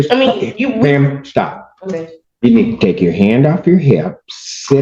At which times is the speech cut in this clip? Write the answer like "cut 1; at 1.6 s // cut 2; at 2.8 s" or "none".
cut 1; at 2.2 s